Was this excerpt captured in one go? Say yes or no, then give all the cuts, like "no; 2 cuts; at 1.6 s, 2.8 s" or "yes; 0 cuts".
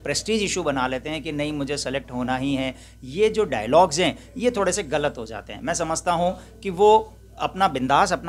yes; 0 cuts